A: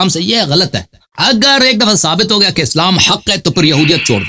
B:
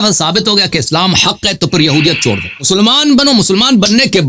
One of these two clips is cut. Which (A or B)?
A